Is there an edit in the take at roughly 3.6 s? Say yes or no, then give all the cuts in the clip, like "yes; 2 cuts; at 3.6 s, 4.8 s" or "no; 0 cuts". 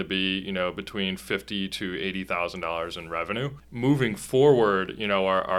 yes; 1 cut; at 3.6 s